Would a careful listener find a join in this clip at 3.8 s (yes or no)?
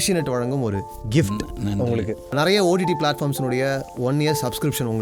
no